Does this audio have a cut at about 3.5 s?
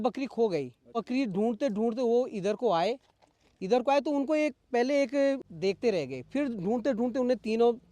no; 2 cuts; at 1.0 s, 5.5 s

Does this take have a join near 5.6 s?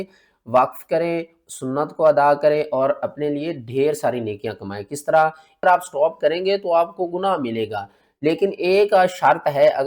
yes; 1 cut; at 5.6 s

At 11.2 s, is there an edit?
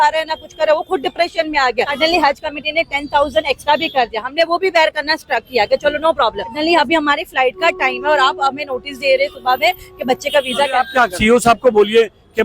yes; 3 cuts; at 1.9 s, 6.6 s, 11.2 s

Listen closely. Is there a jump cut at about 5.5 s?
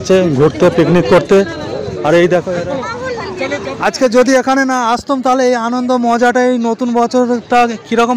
no; 1 cut; at 2.6 s

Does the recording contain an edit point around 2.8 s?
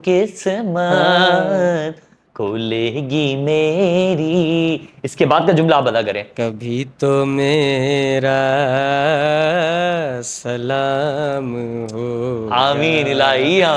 no; 0 cuts

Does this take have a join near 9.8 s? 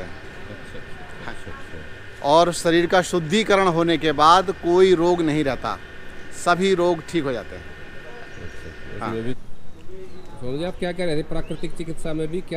yes; 2 cuts; at 1.3 s, 9.8 s

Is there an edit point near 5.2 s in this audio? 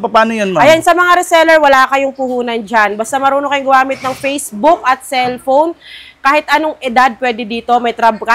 no; 0 cuts

